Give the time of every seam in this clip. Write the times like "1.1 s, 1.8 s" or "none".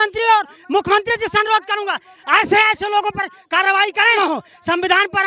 4.2 s